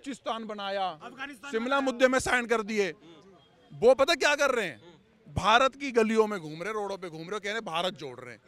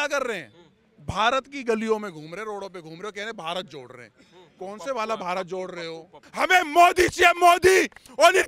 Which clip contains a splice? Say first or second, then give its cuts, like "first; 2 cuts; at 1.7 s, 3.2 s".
second; 1 cut; at 6.3 s